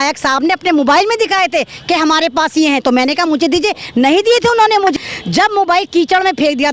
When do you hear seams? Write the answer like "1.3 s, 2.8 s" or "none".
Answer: 4.9 s